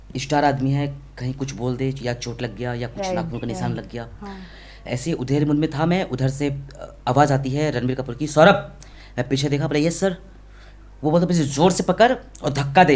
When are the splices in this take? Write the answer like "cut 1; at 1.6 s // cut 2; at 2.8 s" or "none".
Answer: none